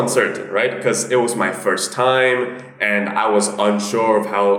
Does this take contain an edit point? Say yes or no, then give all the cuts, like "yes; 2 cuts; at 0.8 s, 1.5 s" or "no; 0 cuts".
no; 0 cuts